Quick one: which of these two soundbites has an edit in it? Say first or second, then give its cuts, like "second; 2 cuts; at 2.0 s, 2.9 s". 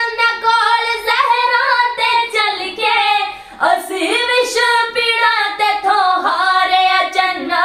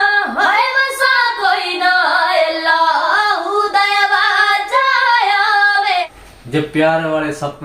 second; 1 cut; at 6.2 s